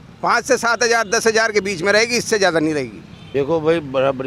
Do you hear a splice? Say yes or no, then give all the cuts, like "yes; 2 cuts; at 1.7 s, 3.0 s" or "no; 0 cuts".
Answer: no; 0 cuts